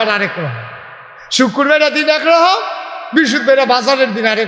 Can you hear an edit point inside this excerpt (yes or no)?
no